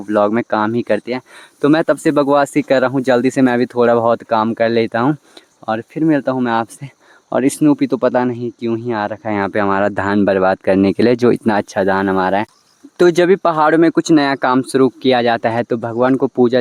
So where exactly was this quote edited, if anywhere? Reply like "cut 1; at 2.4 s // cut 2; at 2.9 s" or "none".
none